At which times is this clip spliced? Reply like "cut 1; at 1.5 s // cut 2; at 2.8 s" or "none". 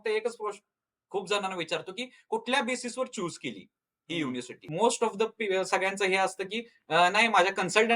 cut 1; at 4.6 s